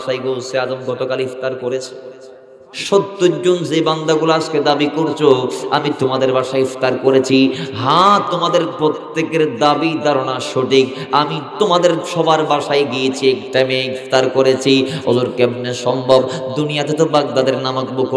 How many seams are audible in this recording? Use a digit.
1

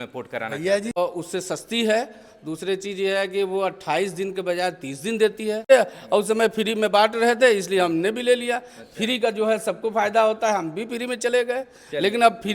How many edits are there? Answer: 2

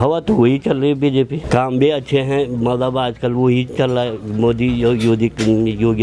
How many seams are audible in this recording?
1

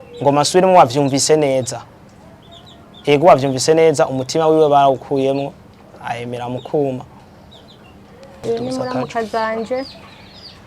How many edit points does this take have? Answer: 1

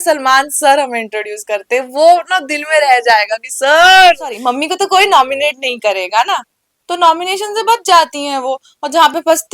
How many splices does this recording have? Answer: 1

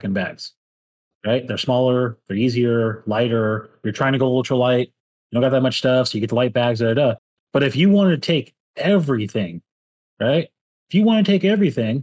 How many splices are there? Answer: 0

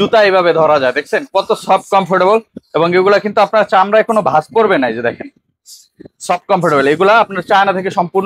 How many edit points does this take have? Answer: 0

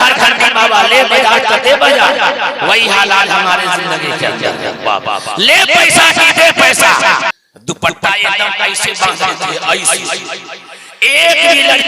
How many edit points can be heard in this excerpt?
1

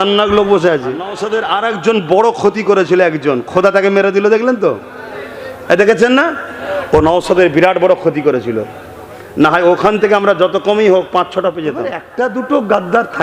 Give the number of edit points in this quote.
2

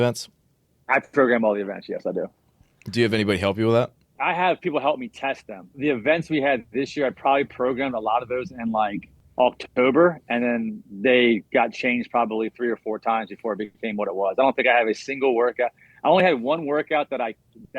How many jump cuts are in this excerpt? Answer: 2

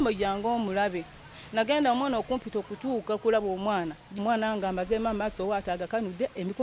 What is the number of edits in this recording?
1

